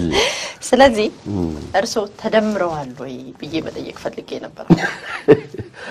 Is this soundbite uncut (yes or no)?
yes